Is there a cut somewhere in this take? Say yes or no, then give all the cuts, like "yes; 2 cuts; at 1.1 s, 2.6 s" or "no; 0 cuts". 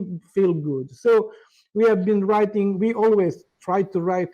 no; 0 cuts